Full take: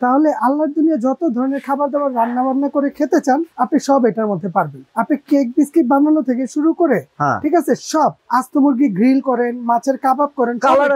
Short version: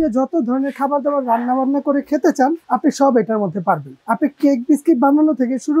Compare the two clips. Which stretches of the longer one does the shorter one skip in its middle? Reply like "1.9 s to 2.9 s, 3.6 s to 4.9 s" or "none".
none